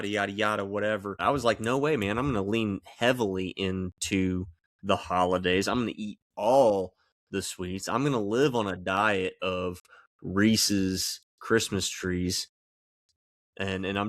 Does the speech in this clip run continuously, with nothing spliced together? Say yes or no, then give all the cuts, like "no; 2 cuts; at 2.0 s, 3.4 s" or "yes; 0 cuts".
no; 1 cut; at 1.2 s